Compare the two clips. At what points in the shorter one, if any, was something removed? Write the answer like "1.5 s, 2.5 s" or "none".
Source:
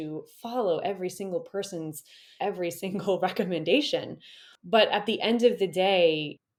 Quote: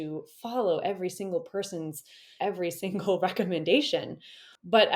none